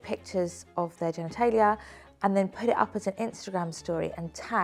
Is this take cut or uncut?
uncut